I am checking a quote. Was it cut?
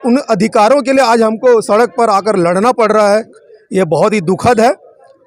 no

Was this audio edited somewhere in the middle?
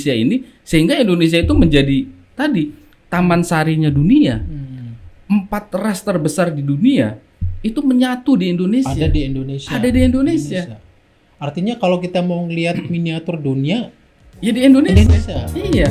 no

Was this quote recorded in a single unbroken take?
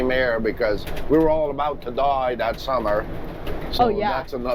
yes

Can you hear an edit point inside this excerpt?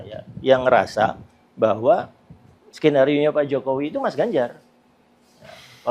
no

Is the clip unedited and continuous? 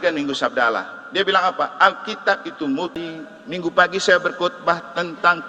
no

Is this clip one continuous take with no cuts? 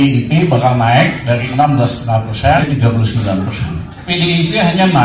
no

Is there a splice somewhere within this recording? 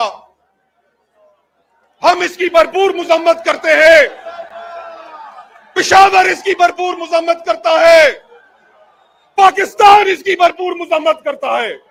no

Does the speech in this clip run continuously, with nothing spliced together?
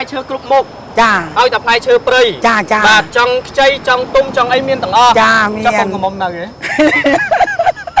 yes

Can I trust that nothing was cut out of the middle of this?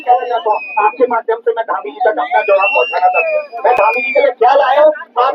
yes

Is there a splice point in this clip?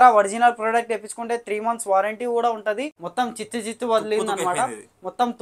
yes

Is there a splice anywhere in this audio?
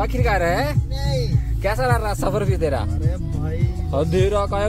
no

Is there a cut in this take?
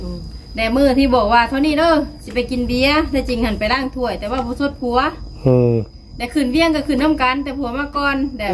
no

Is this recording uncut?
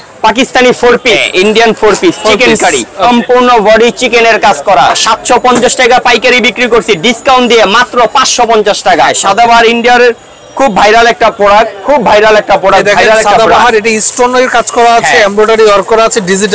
no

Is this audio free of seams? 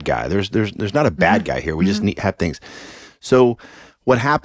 yes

